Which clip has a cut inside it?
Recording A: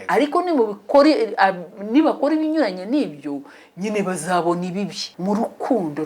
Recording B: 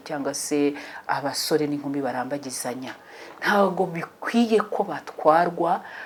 A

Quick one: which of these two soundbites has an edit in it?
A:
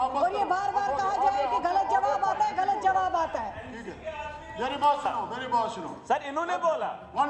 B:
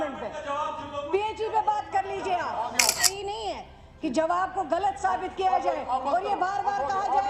B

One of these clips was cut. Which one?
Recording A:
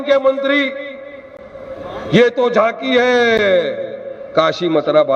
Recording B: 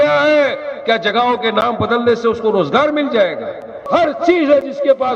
B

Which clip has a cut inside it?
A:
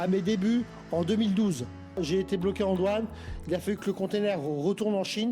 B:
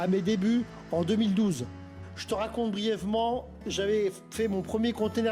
A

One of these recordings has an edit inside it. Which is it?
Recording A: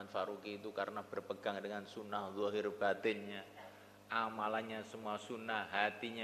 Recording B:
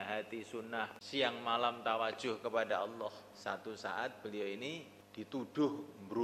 B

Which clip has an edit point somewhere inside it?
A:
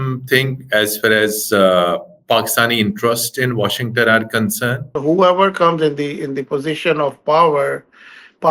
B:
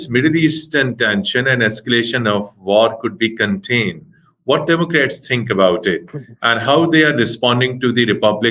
A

